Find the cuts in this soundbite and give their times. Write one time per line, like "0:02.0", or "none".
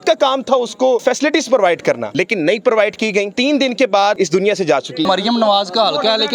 0:01.0
0:02.1
0:03.3
0:05.0